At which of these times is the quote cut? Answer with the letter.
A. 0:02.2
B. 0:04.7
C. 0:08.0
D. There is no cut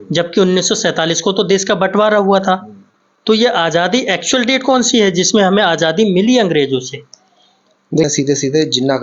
C